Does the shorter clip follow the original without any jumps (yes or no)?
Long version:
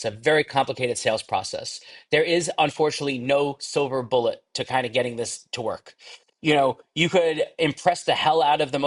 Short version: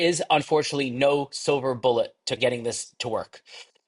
no